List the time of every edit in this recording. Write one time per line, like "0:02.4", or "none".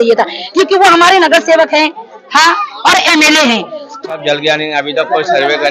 0:03.8